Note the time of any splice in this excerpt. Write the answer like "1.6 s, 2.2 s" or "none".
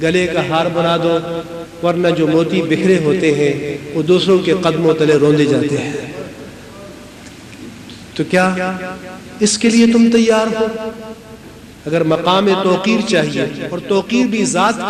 none